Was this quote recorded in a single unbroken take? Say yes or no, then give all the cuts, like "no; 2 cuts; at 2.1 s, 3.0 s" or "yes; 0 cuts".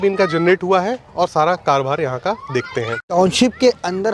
no; 1 cut; at 3.1 s